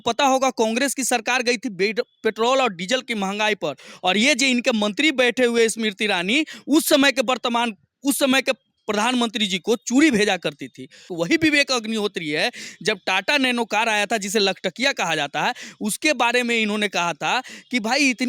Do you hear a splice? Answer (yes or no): yes